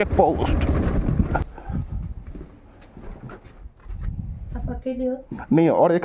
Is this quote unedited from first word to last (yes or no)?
no